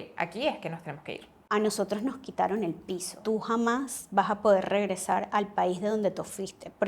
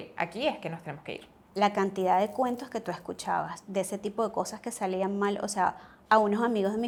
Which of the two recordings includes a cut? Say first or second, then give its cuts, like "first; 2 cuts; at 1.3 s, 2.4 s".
first; 2 cuts; at 1.3 s, 3.1 s